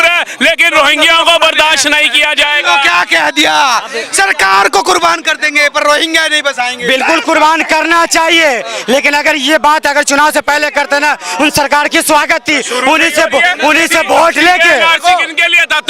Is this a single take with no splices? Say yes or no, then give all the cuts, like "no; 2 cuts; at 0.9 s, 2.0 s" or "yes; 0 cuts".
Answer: yes; 0 cuts